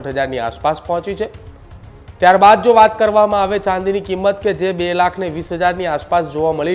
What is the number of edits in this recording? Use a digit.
0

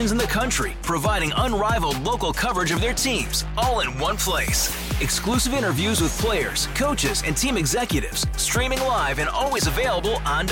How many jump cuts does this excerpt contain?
0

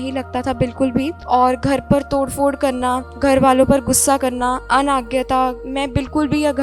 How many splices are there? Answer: 4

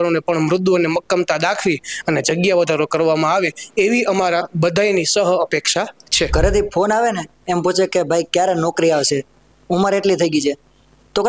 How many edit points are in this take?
1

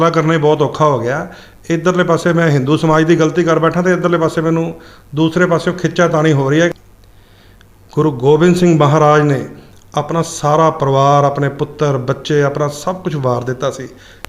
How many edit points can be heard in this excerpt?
1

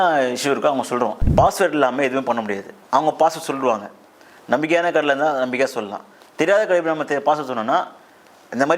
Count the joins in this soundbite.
1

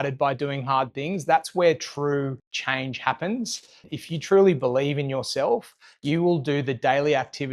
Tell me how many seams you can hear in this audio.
2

